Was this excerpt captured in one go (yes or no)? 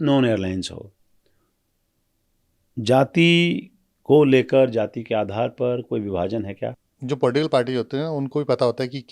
no